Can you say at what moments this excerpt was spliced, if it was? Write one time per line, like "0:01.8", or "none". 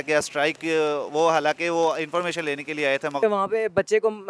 0:03.2

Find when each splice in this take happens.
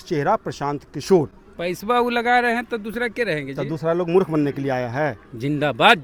none

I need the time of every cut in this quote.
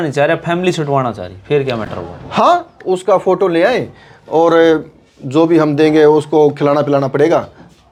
none

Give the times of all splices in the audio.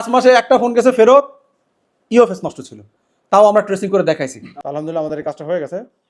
0:04.5

